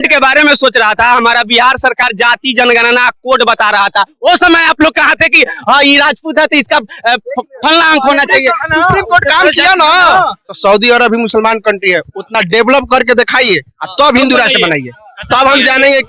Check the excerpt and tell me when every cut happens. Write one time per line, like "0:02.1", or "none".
0:10.4

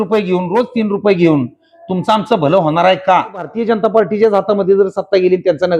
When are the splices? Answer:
0:03.5

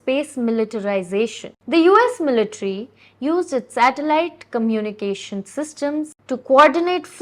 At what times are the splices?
0:01.5
0:06.2

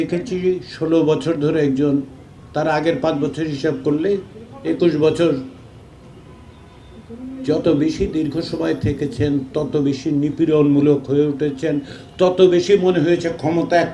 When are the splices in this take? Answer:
none

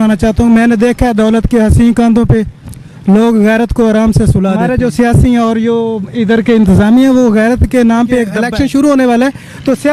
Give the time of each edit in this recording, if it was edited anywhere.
0:04.6
0:08.4

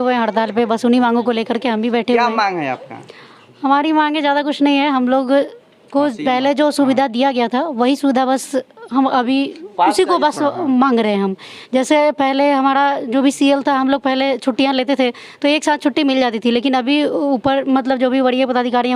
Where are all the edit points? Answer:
none

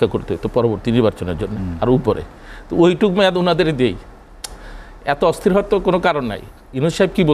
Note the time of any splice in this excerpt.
none

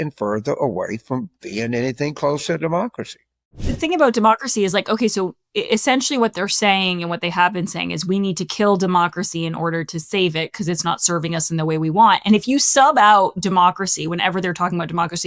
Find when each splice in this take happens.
0:03.6

